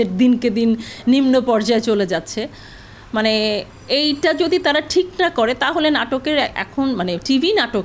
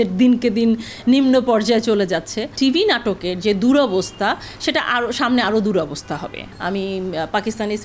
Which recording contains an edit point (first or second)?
second